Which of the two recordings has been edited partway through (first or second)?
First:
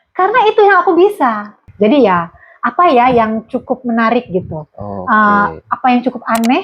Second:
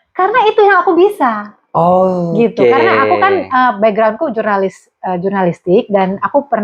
first